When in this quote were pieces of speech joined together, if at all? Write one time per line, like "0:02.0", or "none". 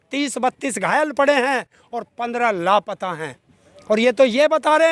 none